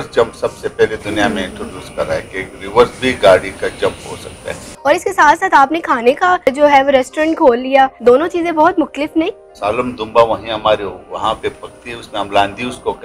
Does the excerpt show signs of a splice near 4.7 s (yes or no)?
yes